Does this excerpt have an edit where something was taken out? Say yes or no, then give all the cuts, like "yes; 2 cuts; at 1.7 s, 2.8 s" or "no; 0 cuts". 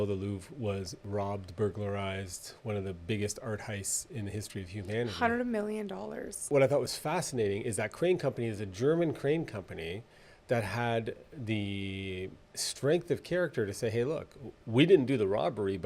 yes; 2 cuts; at 1.0 s, 6.5 s